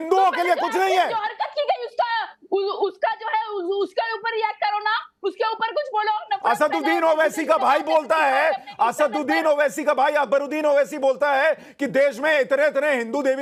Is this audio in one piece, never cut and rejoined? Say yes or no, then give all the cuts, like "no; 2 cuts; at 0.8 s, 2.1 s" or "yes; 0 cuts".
yes; 0 cuts